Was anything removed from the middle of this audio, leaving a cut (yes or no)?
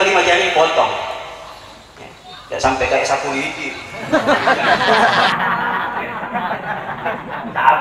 yes